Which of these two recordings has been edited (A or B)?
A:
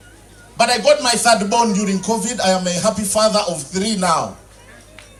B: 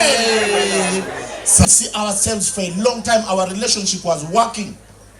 B